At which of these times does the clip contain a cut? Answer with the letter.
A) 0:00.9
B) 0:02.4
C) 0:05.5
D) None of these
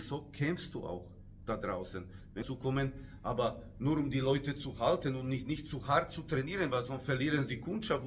B